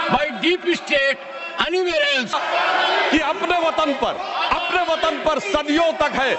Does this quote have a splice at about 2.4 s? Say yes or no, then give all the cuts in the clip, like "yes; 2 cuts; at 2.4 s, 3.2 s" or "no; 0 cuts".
yes; 1 cut; at 2.4 s